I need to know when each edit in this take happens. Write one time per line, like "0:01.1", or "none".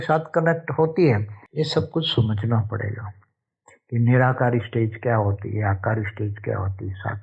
0:01.4